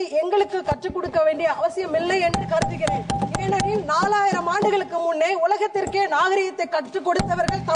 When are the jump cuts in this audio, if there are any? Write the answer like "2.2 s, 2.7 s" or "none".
none